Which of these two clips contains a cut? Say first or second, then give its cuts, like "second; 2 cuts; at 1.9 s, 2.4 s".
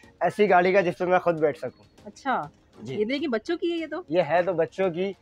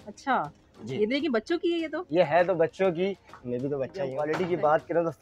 second; 1 cut; at 4.2 s